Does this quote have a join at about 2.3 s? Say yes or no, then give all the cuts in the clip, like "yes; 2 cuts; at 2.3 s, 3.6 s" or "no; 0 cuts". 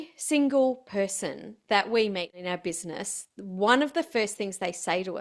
yes; 1 cut; at 2.3 s